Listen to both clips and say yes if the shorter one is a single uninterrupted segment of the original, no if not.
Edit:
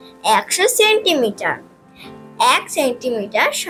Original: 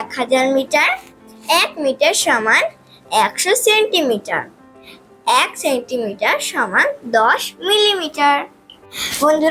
yes